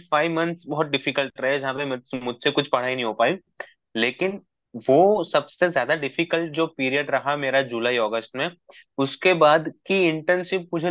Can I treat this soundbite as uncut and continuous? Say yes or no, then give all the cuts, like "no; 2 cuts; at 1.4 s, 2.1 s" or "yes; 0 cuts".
yes; 0 cuts